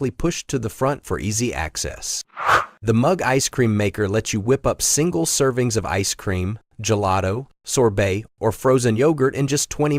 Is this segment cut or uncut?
cut